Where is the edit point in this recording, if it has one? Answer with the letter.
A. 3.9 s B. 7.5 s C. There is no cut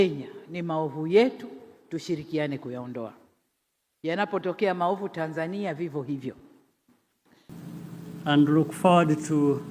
B